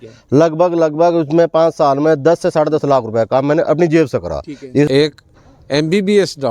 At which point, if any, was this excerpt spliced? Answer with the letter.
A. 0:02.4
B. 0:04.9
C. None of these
B